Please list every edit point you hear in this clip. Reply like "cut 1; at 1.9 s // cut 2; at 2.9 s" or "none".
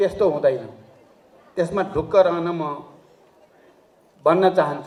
none

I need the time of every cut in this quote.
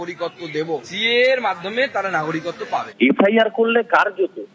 cut 1; at 0.9 s // cut 2; at 2.9 s

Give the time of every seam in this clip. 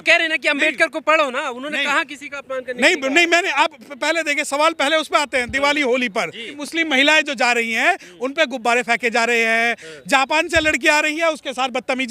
cut 1; at 6.6 s

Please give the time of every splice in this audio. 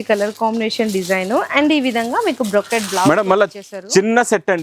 none

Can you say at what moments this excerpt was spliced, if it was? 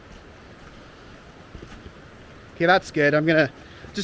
cut 1; at 1.5 s

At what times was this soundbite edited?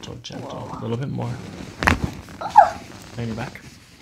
none

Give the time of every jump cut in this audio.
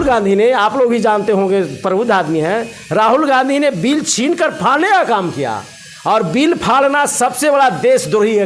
none

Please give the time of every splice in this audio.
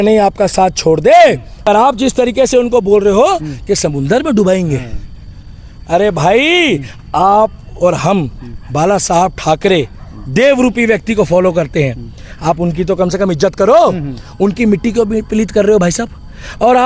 cut 1; at 1.6 s

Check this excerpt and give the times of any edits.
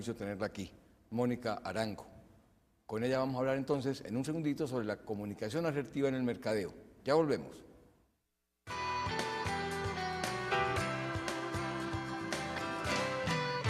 cut 1; at 7.2 s

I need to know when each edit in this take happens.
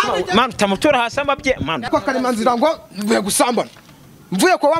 cut 1; at 1.9 s

